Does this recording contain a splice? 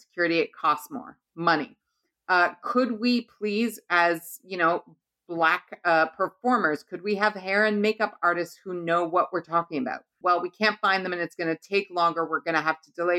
yes; 1 cut; at 10.2 s

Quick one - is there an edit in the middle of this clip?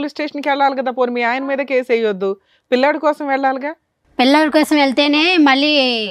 no; 0 cuts

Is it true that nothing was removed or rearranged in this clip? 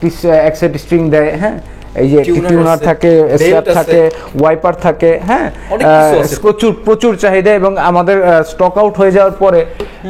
no; 1 cut; at 6.4 s

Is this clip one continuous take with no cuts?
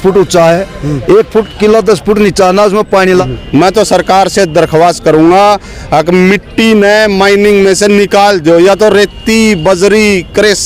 no; 1 cut; at 3.2 s

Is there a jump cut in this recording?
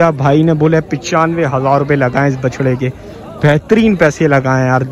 no; 0 cuts

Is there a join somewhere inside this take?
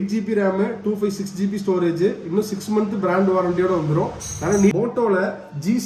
yes; 1 cut; at 4.7 s

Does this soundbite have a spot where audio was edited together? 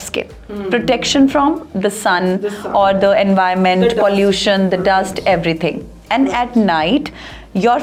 no; 0 cuts

